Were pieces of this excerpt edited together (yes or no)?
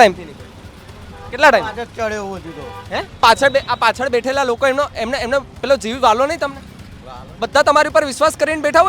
yes